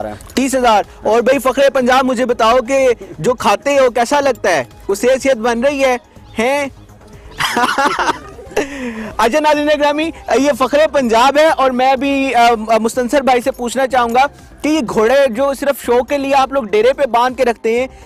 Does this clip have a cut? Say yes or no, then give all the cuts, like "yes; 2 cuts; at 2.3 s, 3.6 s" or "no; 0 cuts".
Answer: no; 0 cuts